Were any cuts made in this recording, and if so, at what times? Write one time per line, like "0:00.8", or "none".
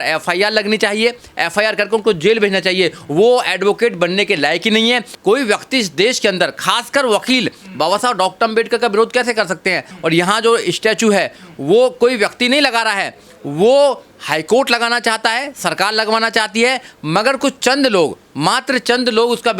0:05.1
0:09.9